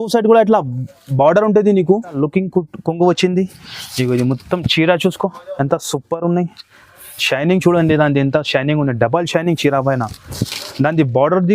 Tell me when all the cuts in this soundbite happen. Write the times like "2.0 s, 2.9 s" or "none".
2.1 s